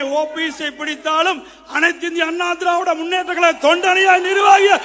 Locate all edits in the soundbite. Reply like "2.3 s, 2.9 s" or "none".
none